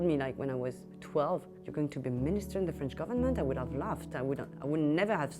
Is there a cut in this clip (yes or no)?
yes